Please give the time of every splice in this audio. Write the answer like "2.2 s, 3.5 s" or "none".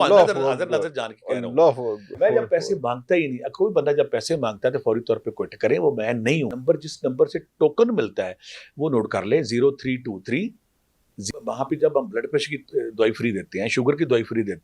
2.2 s, 6.5 s, 11.3 s

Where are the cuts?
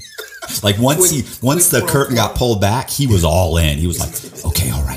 none

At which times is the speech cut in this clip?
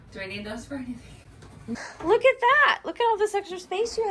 1.7 s

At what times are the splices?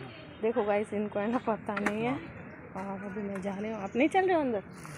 none

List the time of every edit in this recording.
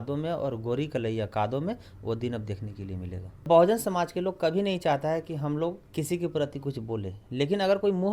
3.5 s, 5.8 s

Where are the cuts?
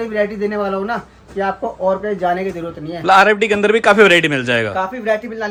none

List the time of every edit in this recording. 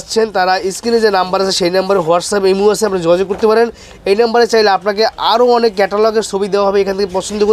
none

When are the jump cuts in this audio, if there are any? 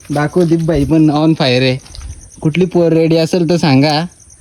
none

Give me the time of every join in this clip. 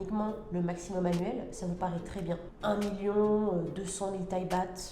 2.5 s

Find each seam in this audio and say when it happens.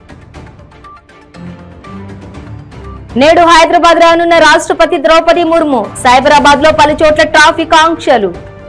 2.4 s

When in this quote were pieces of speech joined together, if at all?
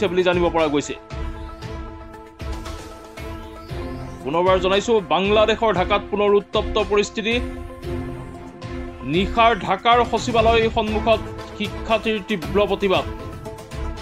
none

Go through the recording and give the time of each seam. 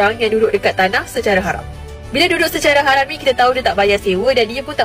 none

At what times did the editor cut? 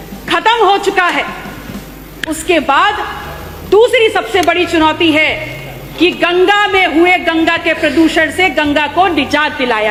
none

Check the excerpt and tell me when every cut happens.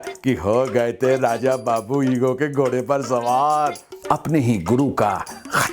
3.9 s

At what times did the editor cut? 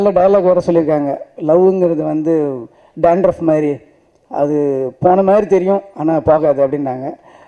none

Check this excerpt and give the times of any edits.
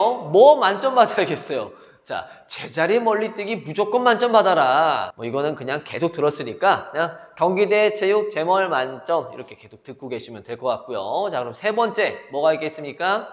none

